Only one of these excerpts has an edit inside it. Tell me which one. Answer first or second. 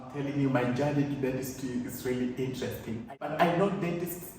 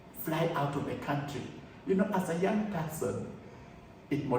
first